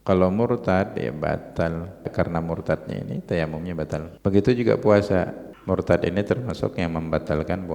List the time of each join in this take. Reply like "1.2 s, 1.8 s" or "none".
2.1 s, 4.1 s, 5.5 s

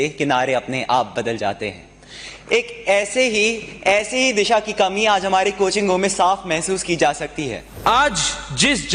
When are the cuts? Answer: 7.6 s

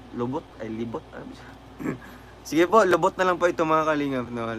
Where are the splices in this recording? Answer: 1.8 s

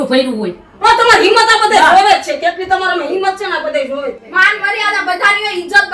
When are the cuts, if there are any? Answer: 4.2 s

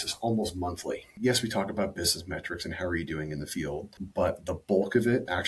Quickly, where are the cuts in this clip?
1.2 s, 4.0 s

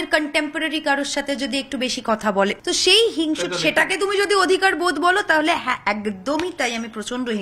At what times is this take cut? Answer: 2.6 s

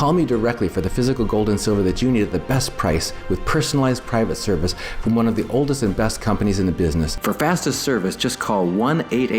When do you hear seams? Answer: 7.2 s

